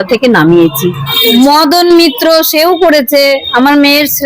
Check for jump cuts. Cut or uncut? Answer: cut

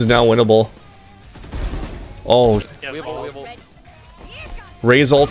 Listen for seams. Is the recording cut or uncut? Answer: cut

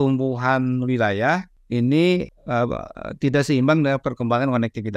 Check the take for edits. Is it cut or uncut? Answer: cut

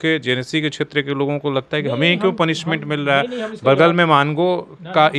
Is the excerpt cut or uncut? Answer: uncut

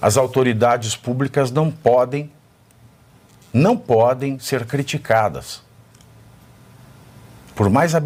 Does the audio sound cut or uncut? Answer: uncut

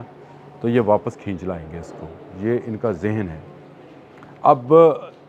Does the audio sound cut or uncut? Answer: uncut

